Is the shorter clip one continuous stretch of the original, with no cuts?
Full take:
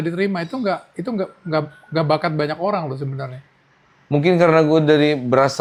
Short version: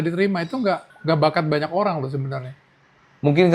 no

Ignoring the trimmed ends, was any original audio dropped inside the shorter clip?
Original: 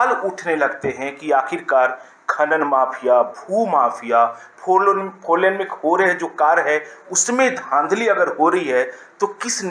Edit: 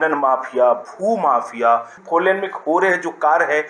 yes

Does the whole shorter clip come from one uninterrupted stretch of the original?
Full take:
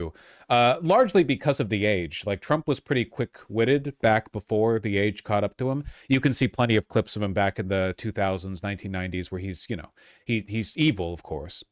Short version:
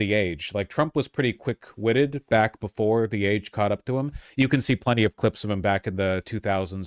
yes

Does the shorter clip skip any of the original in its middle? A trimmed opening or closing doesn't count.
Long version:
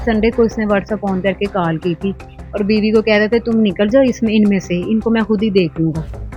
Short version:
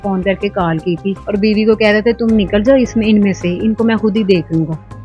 yes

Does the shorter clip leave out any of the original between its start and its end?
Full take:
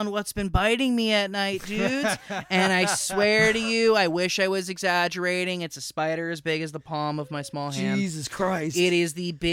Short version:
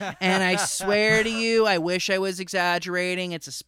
no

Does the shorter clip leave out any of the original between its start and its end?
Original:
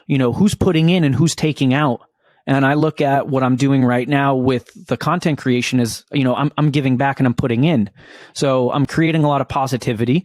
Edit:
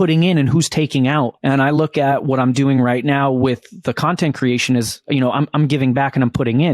yes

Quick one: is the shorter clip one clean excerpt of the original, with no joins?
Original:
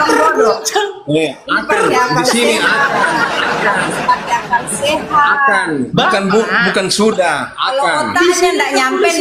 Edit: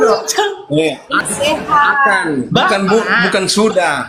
no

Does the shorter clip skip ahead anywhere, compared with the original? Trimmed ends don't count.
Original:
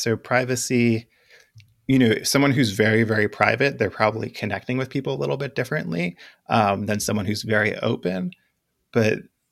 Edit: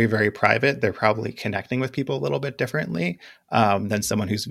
no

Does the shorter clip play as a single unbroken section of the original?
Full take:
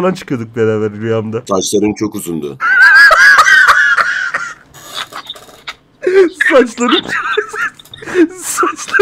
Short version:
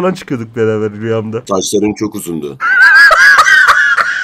yes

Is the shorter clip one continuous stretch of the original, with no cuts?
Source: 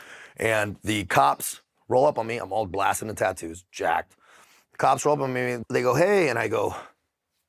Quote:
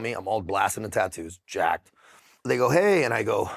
no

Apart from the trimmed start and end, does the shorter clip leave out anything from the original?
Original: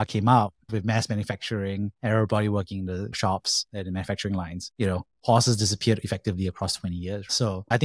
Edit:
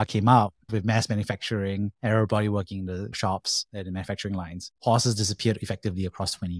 yes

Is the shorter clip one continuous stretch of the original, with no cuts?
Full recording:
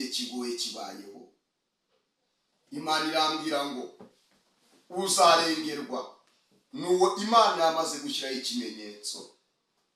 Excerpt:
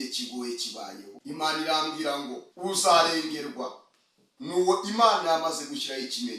no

